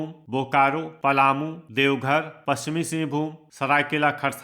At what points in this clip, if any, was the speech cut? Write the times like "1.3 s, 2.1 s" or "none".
0.9 s, 1.6 s, 3.4 s